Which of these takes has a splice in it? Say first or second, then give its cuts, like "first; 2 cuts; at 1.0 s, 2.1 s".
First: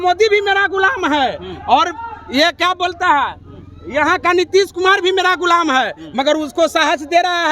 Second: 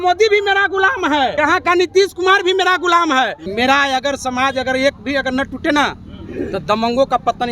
second; 2 cuts; at 1.3 s, 3.4 s